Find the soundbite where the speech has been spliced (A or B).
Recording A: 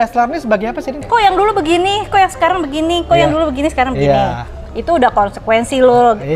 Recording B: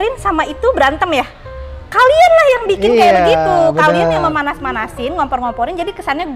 A